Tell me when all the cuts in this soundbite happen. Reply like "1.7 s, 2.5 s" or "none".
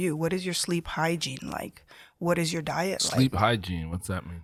none